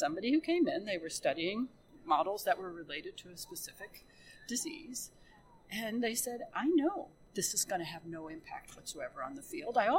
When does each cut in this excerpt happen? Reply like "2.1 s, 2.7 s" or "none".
1.9 s, 7.2 s